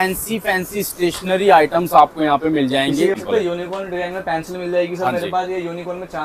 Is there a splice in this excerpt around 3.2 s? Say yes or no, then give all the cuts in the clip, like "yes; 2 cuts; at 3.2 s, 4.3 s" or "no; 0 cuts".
yes; 1 cut; at 3.2 s